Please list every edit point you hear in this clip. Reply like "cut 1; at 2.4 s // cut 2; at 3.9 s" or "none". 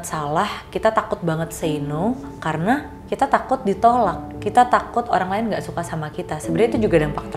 none